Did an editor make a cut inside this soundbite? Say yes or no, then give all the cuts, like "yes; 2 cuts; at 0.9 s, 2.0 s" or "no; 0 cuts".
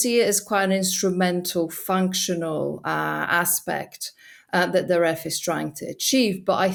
no; 0 cuts